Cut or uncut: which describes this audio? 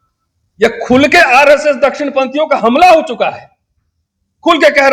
uncut